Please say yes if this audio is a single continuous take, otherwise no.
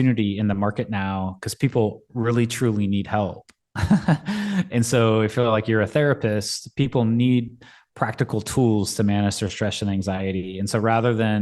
yes